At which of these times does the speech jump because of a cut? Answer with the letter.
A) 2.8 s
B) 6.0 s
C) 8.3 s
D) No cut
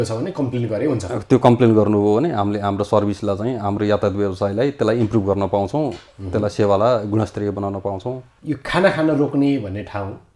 C